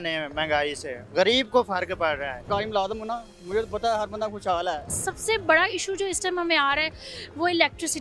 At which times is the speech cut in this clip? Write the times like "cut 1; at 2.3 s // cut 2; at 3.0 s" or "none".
cut 1; at 2.4 s // cut 2; at 5.1 s

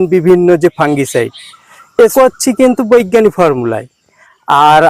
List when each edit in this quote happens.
cut 1; at 2.1 s

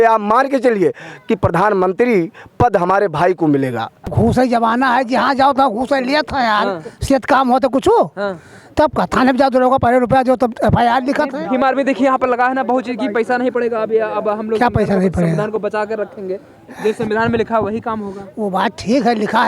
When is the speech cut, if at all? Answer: cut 1; at 4.1 s

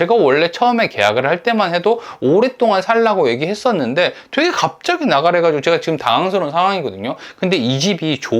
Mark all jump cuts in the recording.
none

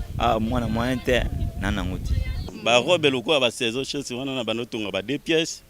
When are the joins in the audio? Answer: cut 1; at 2.5 s

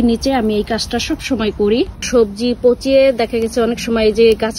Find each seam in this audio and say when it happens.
cut 1; at 2.1 s

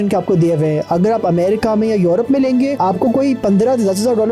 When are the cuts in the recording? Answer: cut 1; at 2.8 s

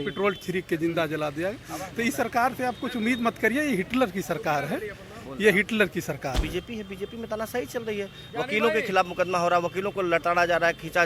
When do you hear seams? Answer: cut 1; at 6.5 s

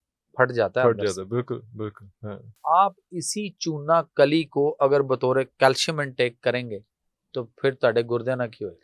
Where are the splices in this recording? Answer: cut 1; at 2.5 s

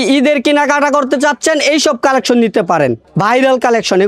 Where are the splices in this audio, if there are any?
cut 1; at 3.1 s

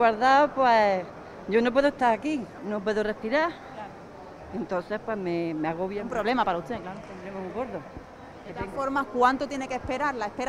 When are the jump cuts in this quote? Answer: none

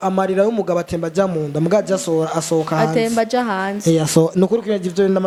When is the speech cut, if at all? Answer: none

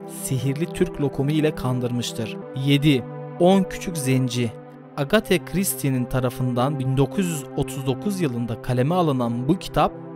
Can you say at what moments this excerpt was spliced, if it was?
cut 1; at 2.4 s

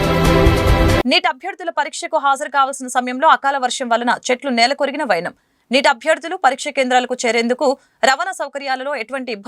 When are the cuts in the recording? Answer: cut 1; at 1.0 s

